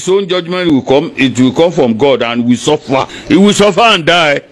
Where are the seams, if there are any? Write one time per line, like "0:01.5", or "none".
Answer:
none

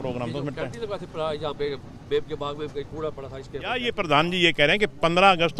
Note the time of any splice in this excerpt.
0:03.8

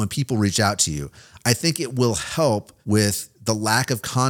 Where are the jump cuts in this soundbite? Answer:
0:02.7

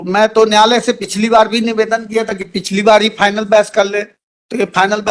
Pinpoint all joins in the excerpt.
none

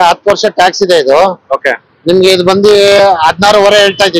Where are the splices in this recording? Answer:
none

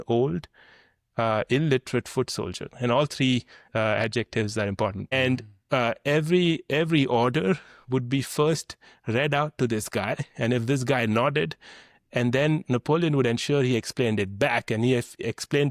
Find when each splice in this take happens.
0:05.0

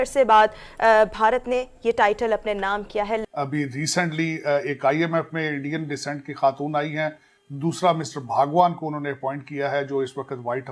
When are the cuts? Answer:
0:03.2

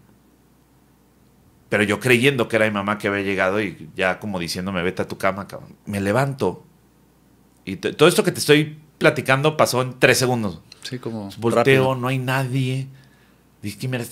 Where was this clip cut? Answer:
0:05.7

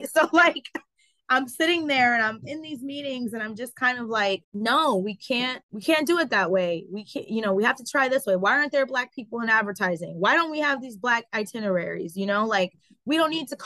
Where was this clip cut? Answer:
0:04.5
0:05.7

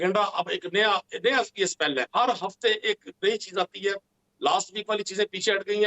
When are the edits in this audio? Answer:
0:02.1

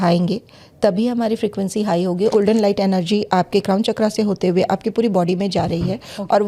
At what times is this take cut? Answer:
0:02.3

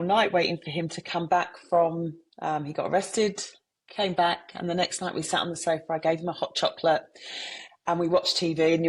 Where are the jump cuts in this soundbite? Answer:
none

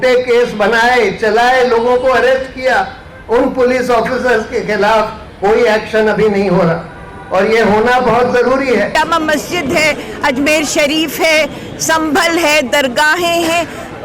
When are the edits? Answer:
0:08.9

